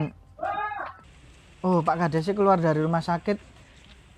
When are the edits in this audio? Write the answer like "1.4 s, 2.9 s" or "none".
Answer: 1.0 s